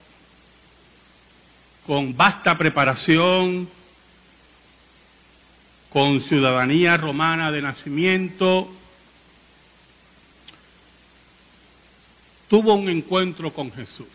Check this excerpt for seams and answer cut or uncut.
uncut